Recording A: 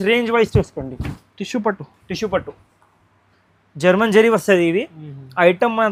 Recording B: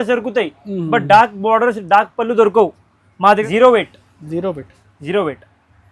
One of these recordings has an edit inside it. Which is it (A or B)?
B